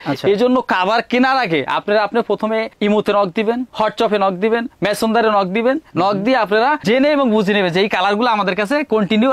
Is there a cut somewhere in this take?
no; 0 cuts

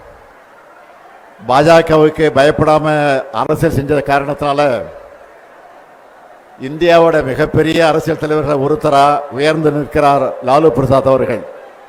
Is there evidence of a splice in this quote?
no; 0 cuts

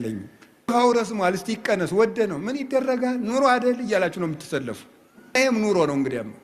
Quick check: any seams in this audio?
yes; 2 cuts; at 0.7 s, 5.4 s

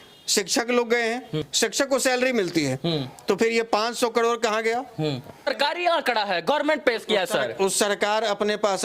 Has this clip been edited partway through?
yes; 2 cuts; at 1.5 s, 5.5 s

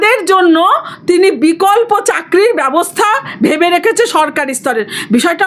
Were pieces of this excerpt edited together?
no; 0 cuts

